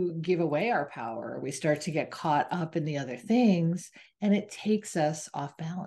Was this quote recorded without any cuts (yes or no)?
yes